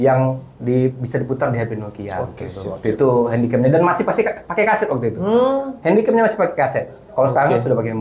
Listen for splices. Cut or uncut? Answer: uncut